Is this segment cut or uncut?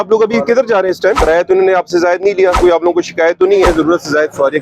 cut